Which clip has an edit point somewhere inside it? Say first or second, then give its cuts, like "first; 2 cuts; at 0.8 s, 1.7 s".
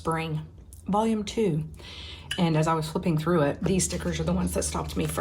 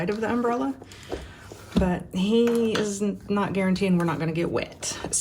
first; 1 cut; at 3.6 s